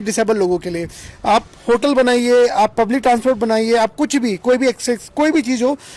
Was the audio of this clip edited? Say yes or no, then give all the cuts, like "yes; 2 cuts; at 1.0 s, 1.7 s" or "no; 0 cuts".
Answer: no; 0 cuts